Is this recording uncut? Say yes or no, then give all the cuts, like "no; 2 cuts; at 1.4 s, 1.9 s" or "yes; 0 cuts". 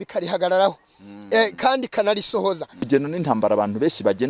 no; 1 cut; at 2.8 s